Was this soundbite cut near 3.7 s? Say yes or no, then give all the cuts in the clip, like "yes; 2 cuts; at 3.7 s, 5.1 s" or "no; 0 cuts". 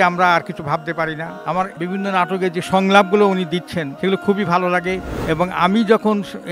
no; 2 cuts; at 1.3 s, 5.0 s